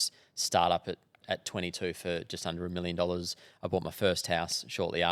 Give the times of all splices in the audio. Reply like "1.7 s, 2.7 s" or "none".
none